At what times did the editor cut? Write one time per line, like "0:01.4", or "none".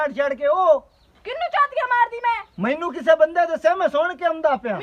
none

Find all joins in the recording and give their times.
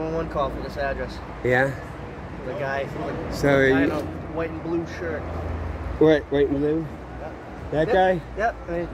none

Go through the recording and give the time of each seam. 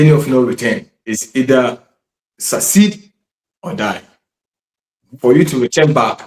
0:00.9

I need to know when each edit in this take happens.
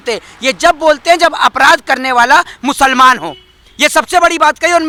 none

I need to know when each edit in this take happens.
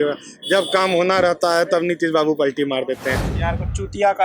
0:03.3

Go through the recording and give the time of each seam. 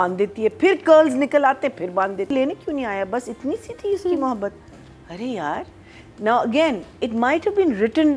0:02.3

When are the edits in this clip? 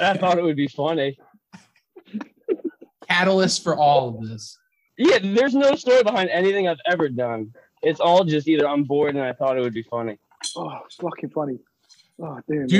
0:10.2

